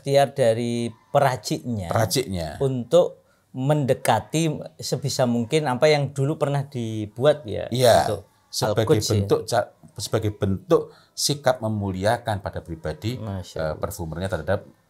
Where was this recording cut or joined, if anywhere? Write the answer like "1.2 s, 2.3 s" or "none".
none